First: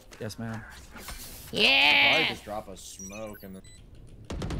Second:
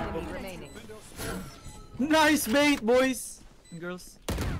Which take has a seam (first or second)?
first